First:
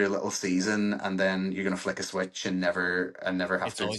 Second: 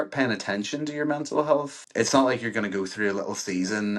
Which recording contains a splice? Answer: second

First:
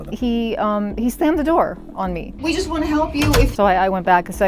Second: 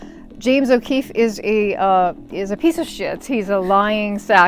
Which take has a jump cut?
first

